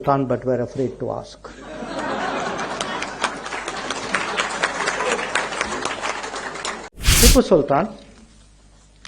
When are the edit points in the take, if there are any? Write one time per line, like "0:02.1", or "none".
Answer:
0:07.0